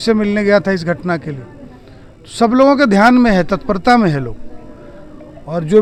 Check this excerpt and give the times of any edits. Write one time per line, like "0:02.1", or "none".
none